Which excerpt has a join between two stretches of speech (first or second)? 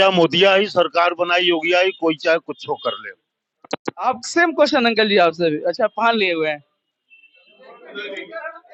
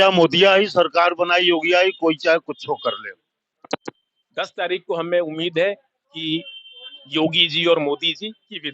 second